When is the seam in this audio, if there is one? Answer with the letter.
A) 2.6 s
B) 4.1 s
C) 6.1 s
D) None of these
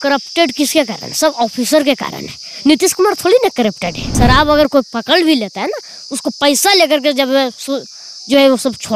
B